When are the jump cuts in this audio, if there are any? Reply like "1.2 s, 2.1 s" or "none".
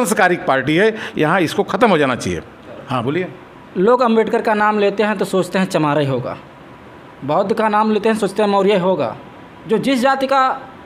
2.6 s